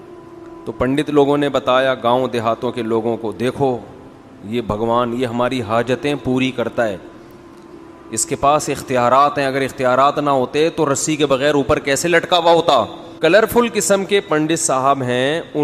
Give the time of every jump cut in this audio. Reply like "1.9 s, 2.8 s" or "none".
13.0 s